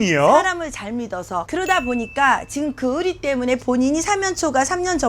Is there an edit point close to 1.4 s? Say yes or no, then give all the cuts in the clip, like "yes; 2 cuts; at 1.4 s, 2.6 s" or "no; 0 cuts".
yes; 1 cut; at 1.4 s